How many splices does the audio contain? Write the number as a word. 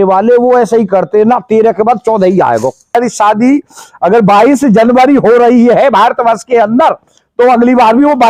one